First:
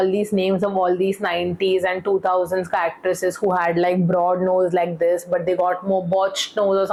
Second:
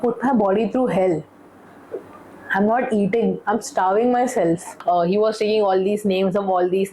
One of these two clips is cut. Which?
second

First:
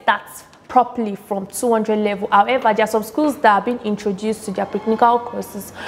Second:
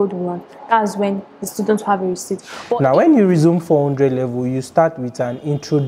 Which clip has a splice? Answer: second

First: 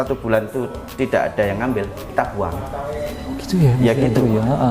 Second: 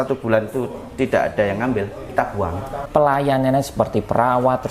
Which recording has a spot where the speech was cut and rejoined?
second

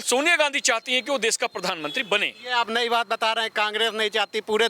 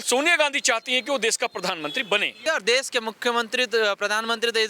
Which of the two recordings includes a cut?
second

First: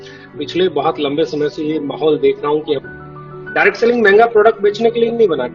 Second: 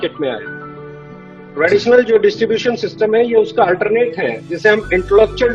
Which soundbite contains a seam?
first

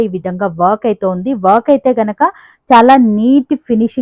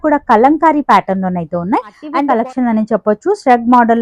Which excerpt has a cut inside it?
second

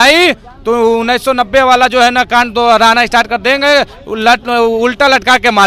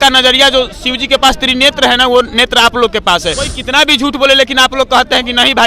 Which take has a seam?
second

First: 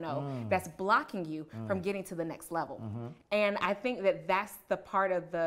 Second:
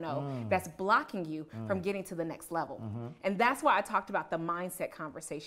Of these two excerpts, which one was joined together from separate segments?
first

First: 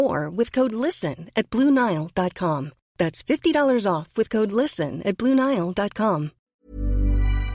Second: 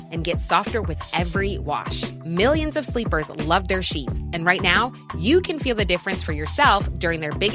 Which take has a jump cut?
first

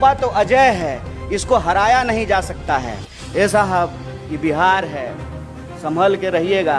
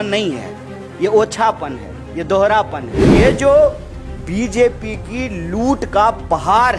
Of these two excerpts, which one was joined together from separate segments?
second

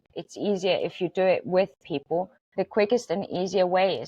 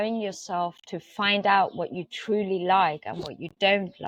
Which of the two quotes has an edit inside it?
first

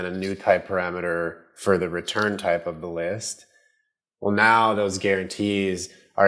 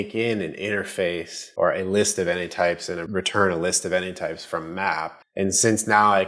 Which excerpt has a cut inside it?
second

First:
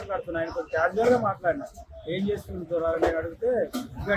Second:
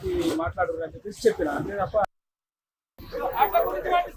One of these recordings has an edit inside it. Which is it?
second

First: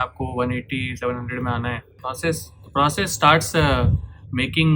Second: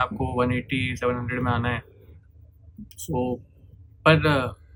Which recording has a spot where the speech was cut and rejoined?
first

